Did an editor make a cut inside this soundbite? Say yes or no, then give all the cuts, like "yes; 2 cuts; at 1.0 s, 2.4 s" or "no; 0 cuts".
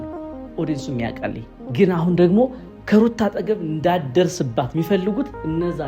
yes; 2 cuts; at 1.6 s, 4.7 s